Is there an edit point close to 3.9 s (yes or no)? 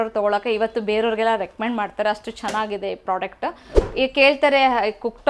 yes